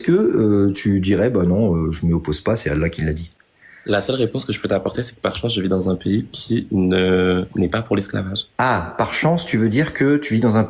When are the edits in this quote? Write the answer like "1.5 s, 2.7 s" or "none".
none